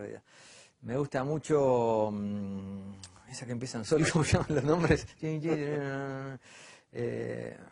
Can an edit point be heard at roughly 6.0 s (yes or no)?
yes